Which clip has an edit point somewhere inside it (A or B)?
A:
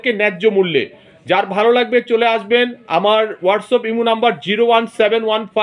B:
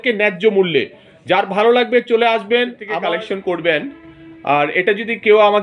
B